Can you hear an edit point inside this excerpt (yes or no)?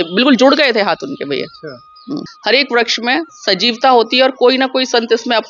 yes